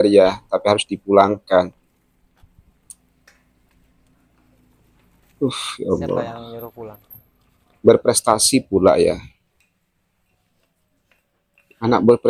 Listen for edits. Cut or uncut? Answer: uncut